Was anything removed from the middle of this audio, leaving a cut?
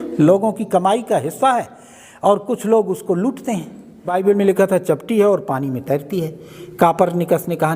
yes; 1 cut; at 4.1 s

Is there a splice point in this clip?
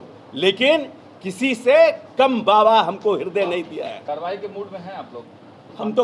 yes; 1 cut; at 4.0 s

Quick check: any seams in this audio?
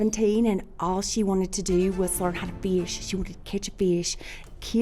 no; 0 cuts

